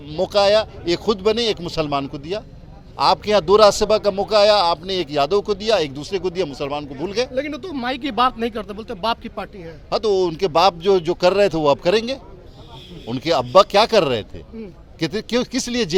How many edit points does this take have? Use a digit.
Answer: 0